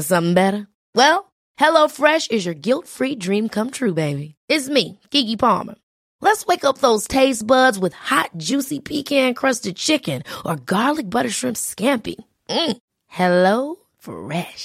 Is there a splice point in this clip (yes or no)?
no